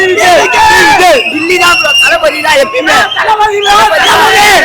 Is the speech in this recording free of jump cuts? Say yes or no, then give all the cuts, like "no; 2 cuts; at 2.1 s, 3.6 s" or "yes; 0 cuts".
no; 1 cut; at 1.3 s